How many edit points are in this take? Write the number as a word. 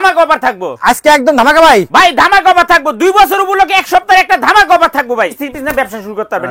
one